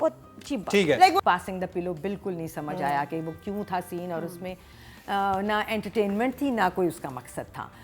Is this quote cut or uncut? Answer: cut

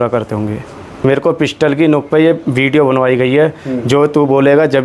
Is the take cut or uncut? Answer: cut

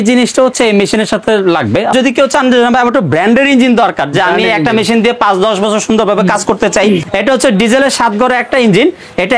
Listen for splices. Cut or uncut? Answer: cut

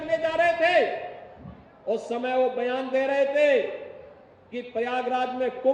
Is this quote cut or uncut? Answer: uncut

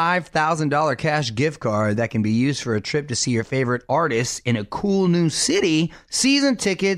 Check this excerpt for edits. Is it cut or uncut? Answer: uncut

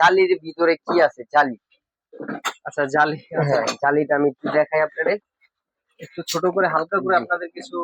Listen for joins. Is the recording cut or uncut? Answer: uncut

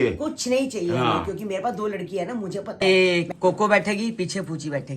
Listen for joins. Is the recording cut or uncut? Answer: cut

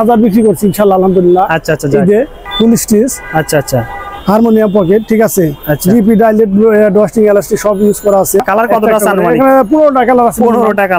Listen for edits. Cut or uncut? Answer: cut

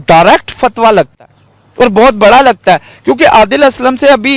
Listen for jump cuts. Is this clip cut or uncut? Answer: uncut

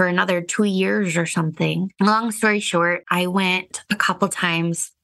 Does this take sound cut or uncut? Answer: uncut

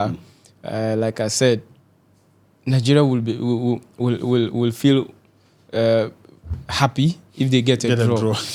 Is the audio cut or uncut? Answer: uncut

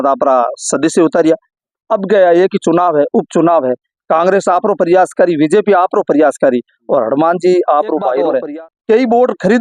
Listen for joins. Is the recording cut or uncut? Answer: cut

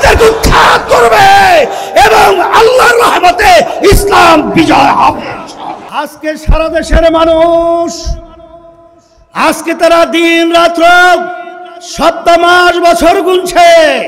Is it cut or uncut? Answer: cut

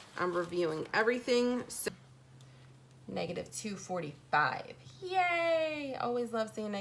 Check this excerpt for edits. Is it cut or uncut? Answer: cut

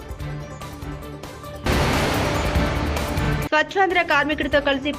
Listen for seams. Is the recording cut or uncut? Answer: uncut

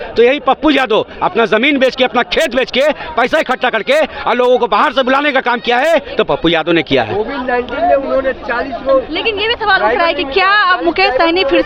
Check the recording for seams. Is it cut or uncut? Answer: uncut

